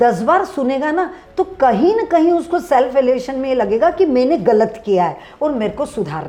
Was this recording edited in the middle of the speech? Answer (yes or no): no